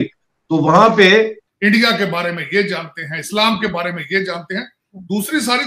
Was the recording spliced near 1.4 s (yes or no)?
yes